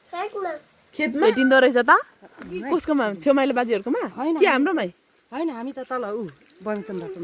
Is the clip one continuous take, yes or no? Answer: no